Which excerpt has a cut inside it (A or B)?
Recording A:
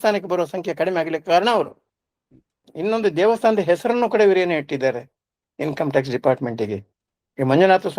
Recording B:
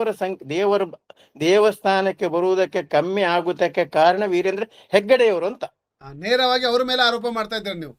A